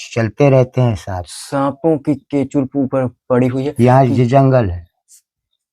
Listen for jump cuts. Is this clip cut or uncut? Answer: uncut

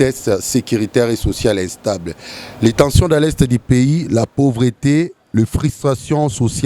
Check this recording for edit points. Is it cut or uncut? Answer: uncut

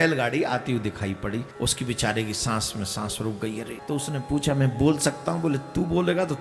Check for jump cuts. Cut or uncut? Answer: cut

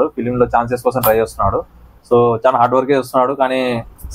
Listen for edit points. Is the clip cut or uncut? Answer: uncut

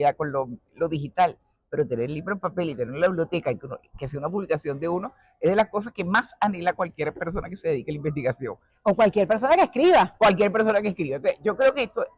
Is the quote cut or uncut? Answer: uncut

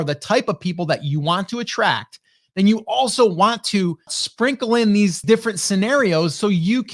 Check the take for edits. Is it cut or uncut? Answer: cut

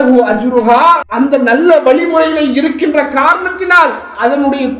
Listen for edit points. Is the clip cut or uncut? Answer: cut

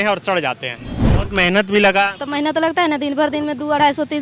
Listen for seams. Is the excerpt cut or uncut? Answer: cut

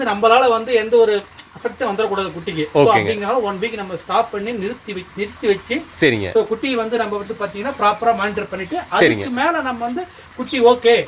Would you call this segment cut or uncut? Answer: uncut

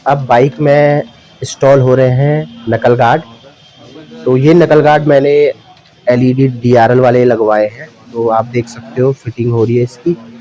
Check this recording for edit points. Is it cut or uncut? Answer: uncut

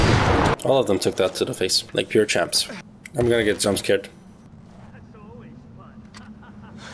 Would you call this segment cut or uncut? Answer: uncut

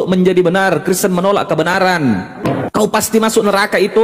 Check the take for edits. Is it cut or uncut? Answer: cut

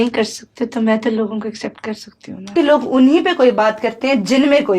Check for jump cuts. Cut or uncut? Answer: cut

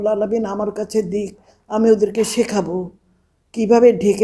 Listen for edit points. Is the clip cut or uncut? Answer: uncut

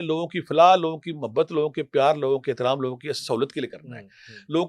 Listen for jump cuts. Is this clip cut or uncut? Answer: uncut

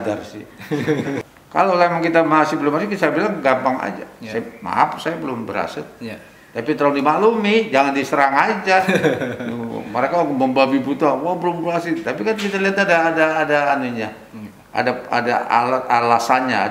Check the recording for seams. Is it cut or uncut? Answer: cut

